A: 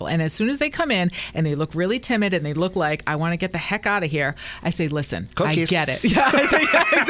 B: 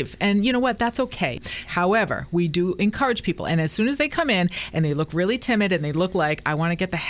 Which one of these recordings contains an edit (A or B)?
B